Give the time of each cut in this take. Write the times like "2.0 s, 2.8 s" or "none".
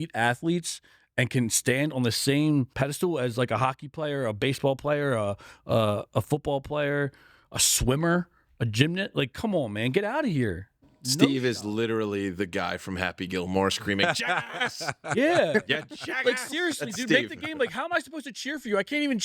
2.7 s